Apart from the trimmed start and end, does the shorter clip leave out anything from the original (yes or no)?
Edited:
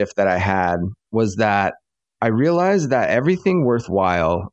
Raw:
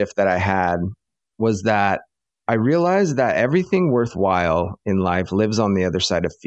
yes